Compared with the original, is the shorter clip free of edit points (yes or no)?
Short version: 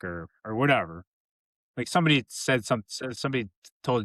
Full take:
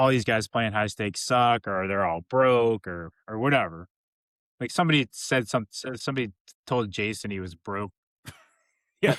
yes